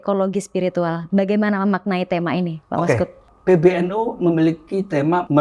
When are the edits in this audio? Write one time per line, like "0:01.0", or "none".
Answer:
0:03.2